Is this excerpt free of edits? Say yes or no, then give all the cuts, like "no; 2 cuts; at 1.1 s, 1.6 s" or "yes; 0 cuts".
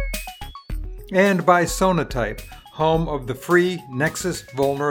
no; 1 cut; at 1.0 s